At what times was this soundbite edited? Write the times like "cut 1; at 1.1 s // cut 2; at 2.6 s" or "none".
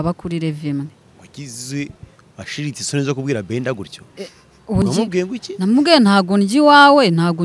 cut 1; at 4.8 s